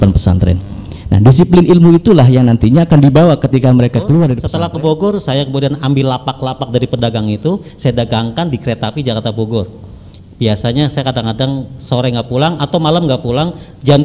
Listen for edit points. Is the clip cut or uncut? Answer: cut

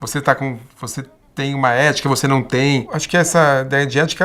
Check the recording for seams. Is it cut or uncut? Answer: cut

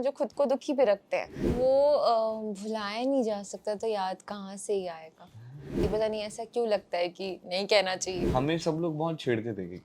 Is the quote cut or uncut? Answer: cut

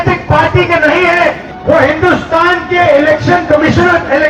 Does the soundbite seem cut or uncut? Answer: cut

